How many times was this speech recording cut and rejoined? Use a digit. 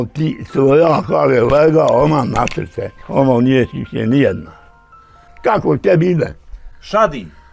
1